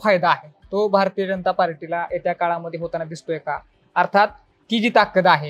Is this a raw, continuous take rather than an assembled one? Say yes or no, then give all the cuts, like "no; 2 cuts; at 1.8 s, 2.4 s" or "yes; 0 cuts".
yes; 0 cuts